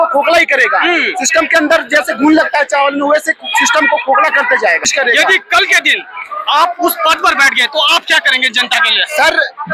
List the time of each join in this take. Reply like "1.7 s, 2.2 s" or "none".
4.9 s